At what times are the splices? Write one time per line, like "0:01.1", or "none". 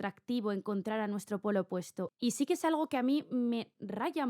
0:02.0